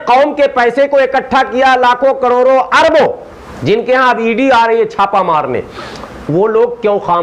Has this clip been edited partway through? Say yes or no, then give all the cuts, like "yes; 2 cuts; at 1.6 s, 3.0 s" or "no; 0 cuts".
no; 0 cuts